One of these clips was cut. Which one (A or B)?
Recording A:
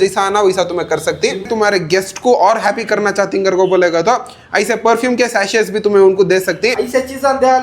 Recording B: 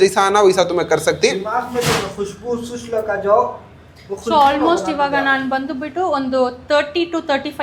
A